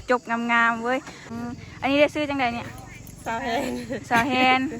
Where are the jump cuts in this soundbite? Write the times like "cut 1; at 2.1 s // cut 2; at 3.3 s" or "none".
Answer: cut 1; at 1.3 s